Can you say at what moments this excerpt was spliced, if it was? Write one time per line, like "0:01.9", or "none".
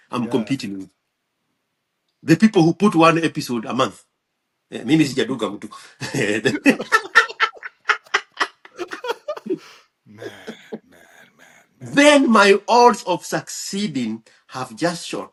none